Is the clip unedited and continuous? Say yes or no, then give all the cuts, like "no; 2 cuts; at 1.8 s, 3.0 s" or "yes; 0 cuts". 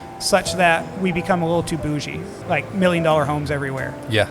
no; 1 cut; at 2.4 s